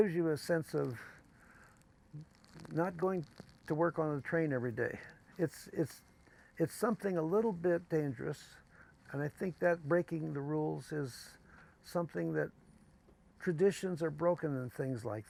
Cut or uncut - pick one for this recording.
uncut